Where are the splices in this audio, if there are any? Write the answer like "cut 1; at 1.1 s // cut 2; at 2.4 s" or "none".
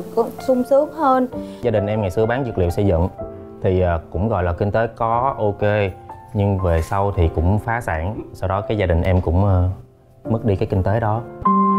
cut 1; at 1.6 s